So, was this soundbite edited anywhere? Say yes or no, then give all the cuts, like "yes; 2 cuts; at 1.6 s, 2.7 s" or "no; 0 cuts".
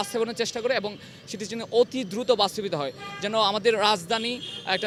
no; 0 cuts